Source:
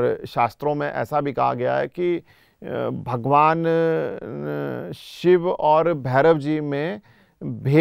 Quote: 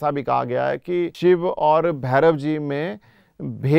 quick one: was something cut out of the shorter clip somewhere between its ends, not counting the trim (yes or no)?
yes